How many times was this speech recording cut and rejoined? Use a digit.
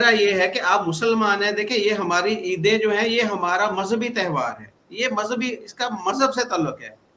0